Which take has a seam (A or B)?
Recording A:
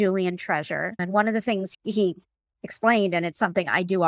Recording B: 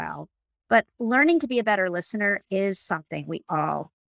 A